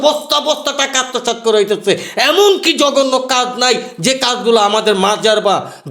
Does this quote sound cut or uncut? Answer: uncut